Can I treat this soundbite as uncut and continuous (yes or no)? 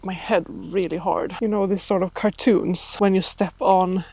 no